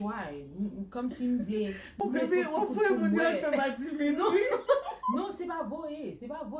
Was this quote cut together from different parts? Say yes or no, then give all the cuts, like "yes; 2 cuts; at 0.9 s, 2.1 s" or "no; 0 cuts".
yes; 1 cut; at 2.0 s